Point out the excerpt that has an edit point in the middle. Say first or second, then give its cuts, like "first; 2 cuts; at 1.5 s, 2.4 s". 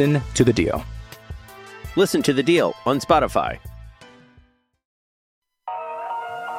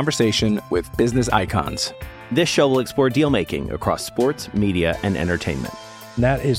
first; 1 cut; at 5.5 s